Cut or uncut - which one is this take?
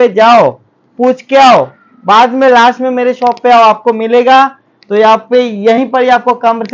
uncut